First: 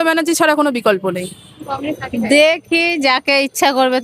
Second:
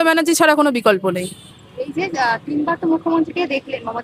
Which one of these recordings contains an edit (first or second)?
first